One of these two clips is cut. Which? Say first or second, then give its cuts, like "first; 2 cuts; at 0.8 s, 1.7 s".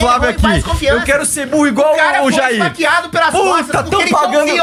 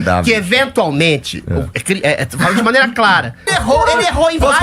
second; 1 cut; at 3.5 s